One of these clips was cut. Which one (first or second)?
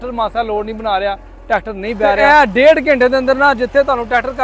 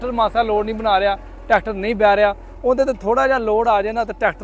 first